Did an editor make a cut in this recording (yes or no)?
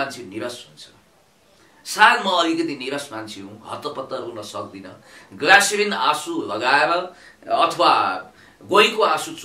no